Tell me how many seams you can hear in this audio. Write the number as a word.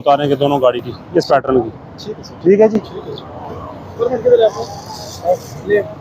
zero